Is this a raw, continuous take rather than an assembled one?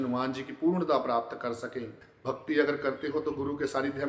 no; 1 cut; at 2.1 s

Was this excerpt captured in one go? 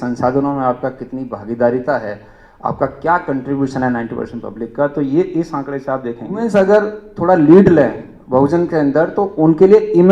no; 1 cut; at 6.3 s

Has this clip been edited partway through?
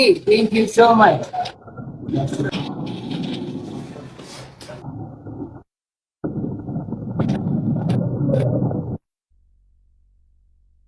yes; 1 cut; at 2.5 s

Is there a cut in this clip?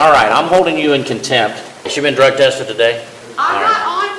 yes; 2 cuts; at 1.8 s, 3.2 s

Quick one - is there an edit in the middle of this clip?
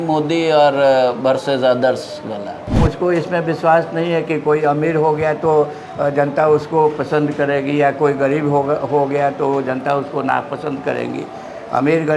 yes; 1 cut; at 2.8 s

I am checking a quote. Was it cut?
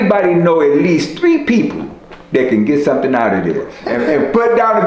yes; 1 cut; at 3.8 s

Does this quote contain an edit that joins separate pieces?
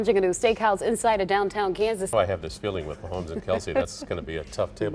yes; 1 cut; at 2.1 s

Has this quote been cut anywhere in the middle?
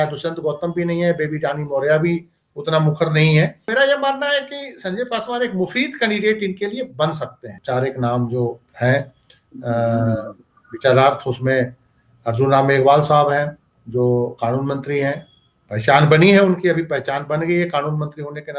yes; 2 cuts; at 3.6 s, 7.6 s

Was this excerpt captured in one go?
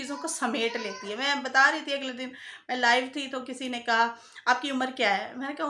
yes; 0 cuts

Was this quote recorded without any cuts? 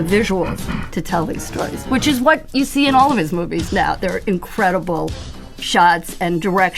yes; 0 cuts

